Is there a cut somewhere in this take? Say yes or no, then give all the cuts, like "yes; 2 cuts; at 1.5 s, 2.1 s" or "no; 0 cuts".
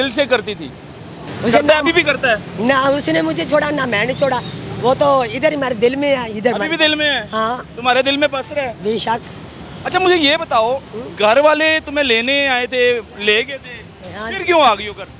yes; 1 cut; at 1.2 s